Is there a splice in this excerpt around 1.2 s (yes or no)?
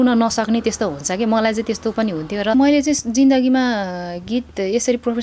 no